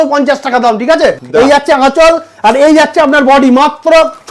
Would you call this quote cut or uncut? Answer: cut